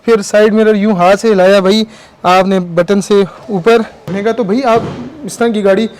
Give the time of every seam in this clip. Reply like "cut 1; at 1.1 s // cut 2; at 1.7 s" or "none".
cut 1; at 4.1 s